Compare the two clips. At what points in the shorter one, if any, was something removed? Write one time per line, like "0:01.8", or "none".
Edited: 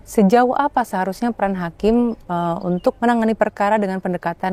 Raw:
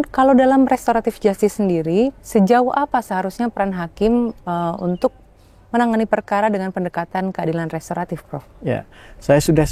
0:03.0